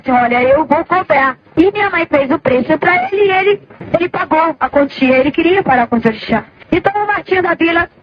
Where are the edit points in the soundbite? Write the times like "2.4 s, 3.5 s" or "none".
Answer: 1.4 s, 3.7 s, 6.5 s